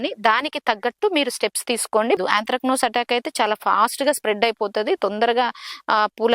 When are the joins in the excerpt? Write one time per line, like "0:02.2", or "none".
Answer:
0:02.2